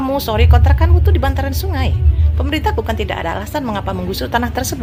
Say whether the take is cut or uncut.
uncut